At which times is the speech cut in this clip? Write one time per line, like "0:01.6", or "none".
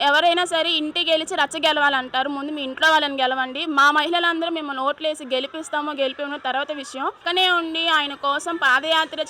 0:07.2